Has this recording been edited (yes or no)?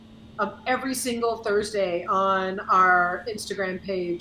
no